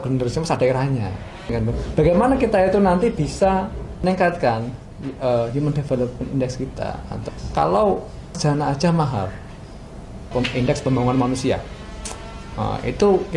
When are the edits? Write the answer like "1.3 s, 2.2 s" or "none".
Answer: 1.5 s, 4.0 s, 7.2 s, 8.4 s, 10.3 s

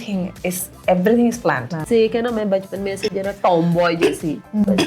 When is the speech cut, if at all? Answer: 1.8 s

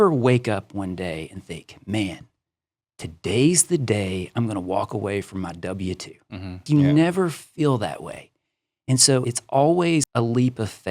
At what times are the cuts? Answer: 6.6 s, 9.2 s, 10.1 s

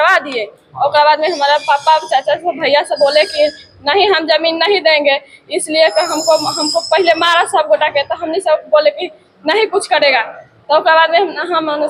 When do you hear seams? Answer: none

